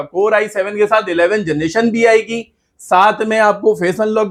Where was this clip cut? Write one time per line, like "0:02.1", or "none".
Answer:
none